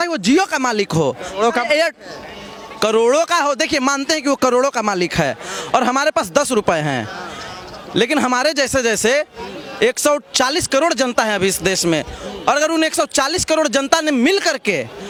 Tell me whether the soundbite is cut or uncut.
uncut